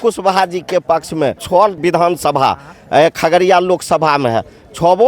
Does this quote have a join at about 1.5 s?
yes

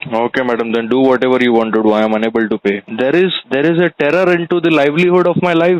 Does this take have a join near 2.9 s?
yes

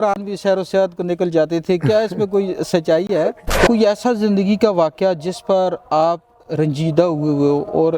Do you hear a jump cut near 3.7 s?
yes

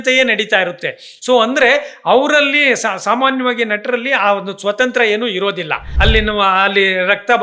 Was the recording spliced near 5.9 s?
yes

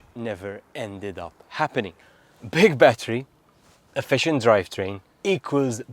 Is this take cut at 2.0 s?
yes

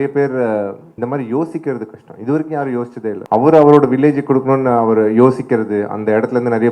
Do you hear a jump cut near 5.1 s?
no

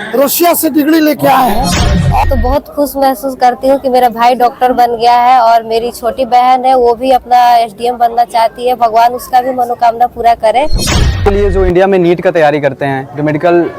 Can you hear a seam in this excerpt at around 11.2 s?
yes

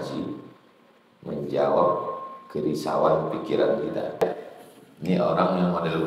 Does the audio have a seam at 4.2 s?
yes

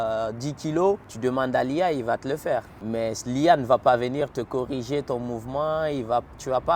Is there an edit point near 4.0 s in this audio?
no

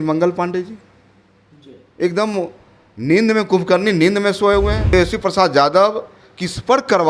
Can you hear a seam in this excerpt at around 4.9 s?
yes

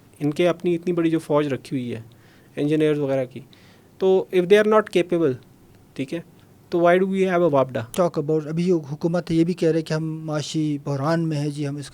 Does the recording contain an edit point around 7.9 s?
yes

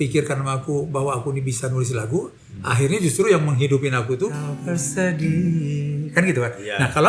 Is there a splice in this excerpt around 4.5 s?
yes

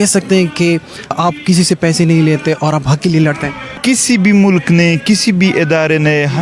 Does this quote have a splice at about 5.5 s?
no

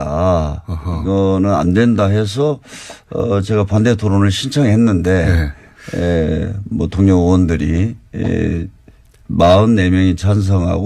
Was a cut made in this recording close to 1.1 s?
no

